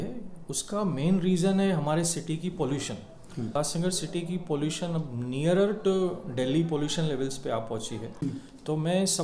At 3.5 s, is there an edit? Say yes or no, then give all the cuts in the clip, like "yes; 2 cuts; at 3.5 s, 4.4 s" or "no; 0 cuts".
yes; 2 cuts; at 3.5 s, 8.1 s